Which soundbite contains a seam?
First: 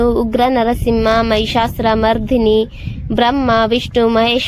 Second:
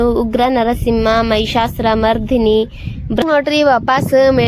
second; 1 cut; at 3.2 s

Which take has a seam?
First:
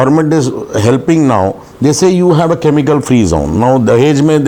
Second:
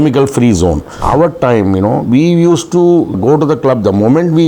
second; 2 cuts; at 0.9 s, 3.2 s

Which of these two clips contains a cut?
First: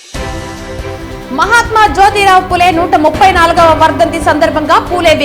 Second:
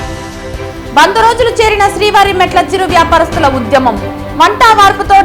first; 1 cut; at 0.9 s

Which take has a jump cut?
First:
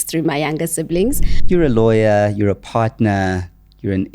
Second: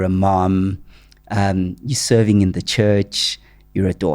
first; 1 cut; at 1.3 s

